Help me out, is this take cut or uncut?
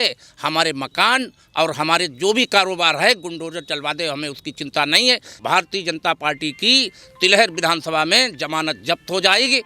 cut